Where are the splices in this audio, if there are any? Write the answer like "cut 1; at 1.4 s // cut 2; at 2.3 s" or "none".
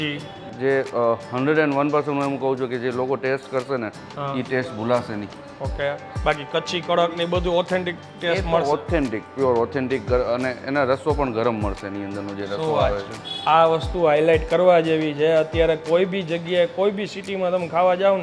none